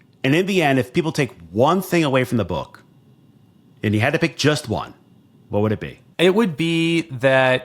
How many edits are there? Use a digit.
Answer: 1